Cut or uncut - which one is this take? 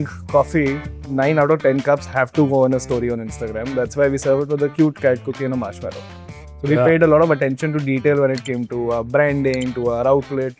uncut